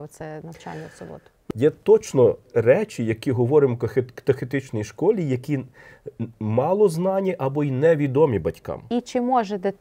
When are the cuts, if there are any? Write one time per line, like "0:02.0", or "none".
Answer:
0:01.4
0:08.9